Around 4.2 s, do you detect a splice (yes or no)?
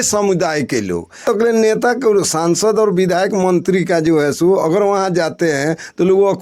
no